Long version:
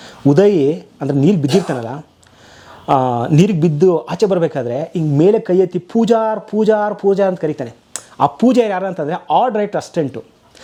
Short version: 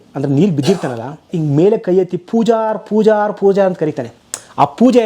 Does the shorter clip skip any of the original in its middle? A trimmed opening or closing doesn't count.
yes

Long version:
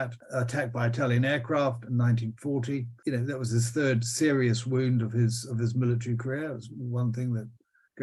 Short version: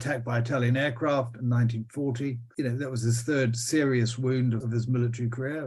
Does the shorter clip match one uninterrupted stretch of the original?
no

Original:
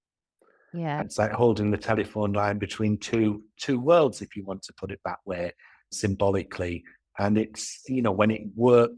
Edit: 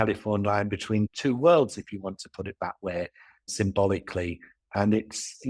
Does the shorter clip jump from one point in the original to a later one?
yes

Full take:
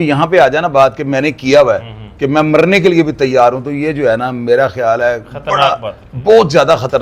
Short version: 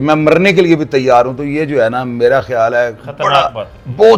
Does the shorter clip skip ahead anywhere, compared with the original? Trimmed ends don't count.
no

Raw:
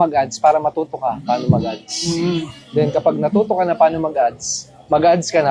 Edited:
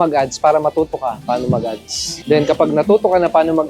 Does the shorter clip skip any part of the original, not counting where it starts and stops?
yes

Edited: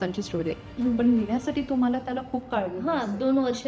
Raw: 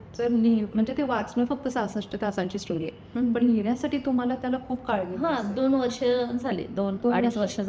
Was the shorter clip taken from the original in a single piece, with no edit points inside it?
yes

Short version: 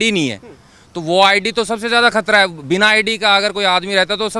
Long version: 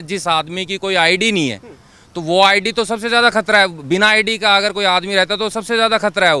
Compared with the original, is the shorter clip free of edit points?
yes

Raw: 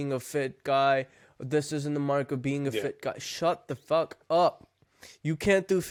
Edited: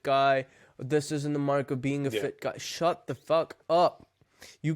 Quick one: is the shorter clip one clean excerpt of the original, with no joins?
yes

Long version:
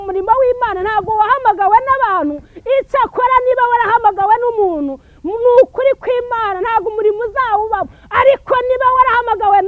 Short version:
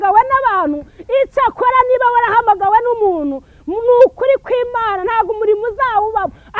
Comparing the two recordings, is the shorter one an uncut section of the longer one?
yes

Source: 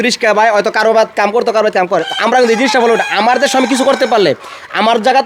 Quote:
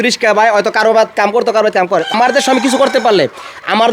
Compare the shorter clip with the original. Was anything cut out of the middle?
yes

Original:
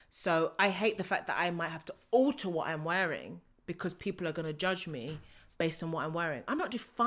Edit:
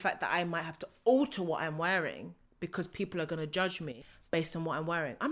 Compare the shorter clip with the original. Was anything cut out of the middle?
yes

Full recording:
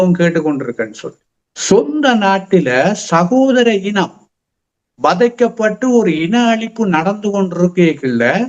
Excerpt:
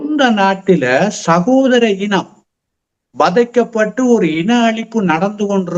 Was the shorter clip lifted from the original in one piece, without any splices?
yes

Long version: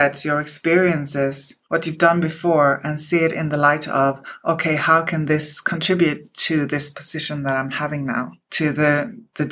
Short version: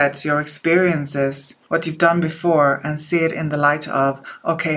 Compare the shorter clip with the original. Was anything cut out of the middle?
no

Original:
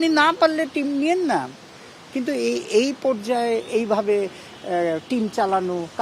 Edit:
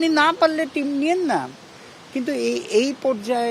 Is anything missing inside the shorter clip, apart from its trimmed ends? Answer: no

